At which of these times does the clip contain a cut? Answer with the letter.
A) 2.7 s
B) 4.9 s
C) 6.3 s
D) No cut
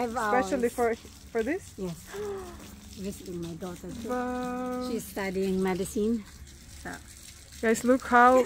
D